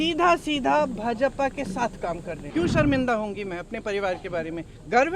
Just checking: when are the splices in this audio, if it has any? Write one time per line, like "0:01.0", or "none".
0:02.3